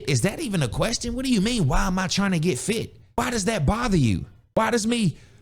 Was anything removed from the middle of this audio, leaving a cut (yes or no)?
yes